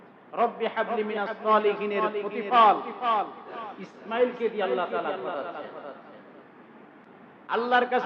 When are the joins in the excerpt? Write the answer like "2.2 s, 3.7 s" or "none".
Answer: 7.0 s